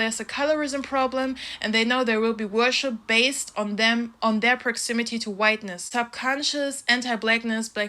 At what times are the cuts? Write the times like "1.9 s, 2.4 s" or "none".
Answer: 5.8 s